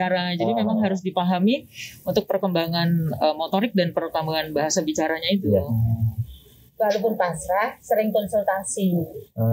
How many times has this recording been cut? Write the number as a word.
one